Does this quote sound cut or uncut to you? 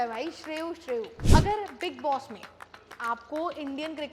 cut